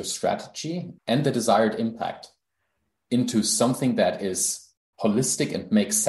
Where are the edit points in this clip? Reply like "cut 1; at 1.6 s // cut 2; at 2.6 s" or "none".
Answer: cut 1; at 0.9 s

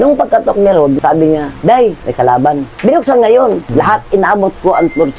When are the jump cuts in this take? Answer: cut 1; at 2.7 s // cut 2; at 3.6 s

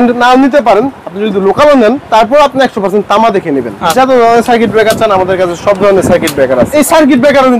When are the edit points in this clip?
cut 1; at 2.0 s // cut 2; at 3.8 s // cut 3; at 6.7 s

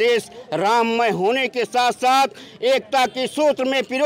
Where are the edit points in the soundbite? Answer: none

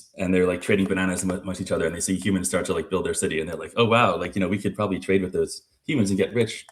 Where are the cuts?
cut 1; at 3.5 s

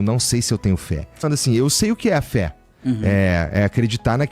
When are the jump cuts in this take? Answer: cut 1; at 1.3 s

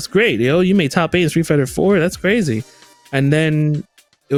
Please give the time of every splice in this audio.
none

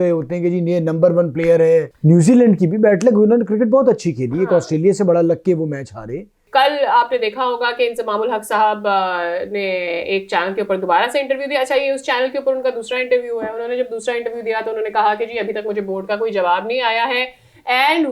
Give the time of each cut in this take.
cut 1; at 1.9 s // cut 2; at 6.4 s

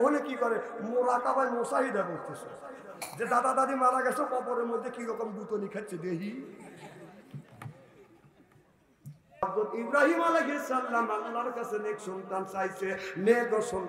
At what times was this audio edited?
cut 1; at 9.4 s

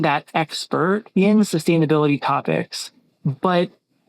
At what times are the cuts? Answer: cut 1; at 1.1 s

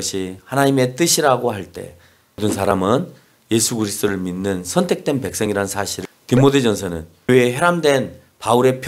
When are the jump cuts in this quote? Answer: cut 1; at 2.4 s // cut 2; at 5.9 s // cut 3; at 7.3 s

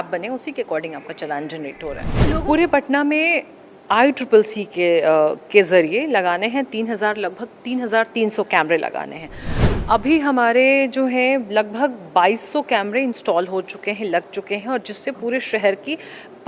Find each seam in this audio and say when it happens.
cut 1; at 2.1 s

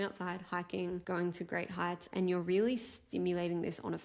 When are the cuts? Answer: cut 1; at 1.0 s

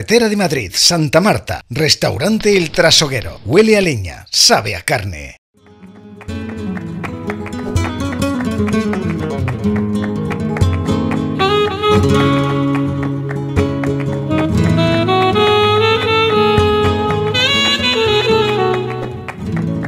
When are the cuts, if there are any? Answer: cut 1; at 5.5 s

